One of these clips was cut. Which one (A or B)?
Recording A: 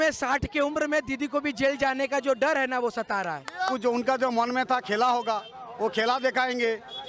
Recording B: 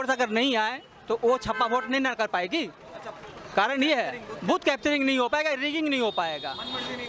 A